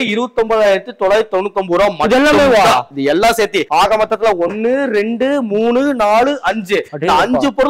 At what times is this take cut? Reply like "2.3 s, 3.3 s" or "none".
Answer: none